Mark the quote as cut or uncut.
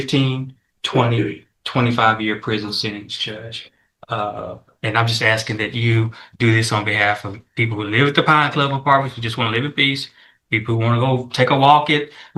uncut